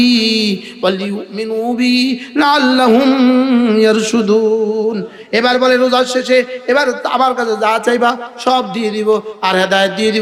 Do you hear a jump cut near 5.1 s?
no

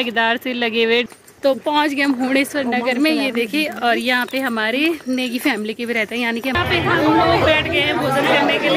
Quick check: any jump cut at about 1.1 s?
yes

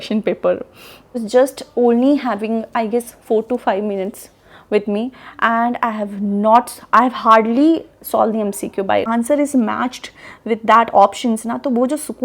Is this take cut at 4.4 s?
no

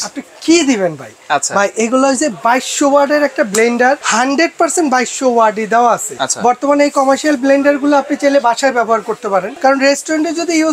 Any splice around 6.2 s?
yes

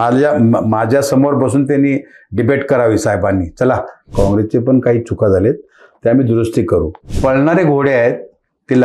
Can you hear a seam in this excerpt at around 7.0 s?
yes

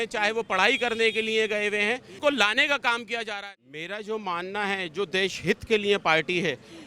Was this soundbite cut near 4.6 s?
no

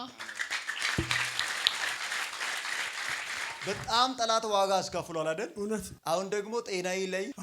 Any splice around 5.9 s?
yes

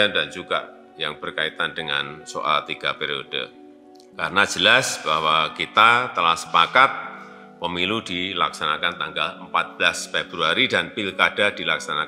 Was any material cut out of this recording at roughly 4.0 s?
yes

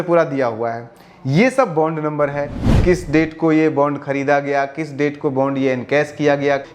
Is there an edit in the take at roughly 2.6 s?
yes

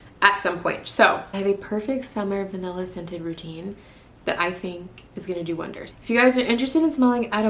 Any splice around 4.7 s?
no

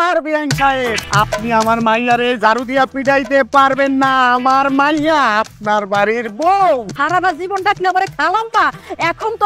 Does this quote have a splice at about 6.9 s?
yes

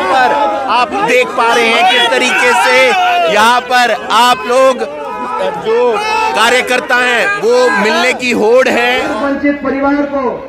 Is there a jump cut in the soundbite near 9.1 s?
yes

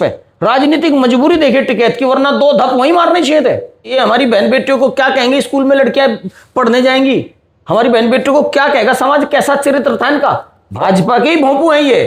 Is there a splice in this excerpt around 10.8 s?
yes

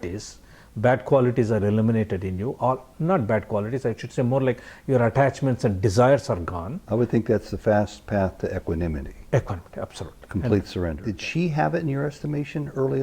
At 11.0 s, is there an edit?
yes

